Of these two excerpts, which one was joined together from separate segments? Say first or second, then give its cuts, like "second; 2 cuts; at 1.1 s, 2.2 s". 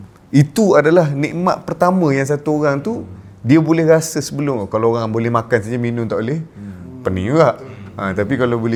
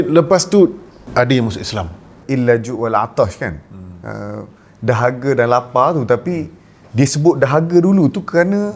second; 2 cuts; at 1.0 s, 2.2 s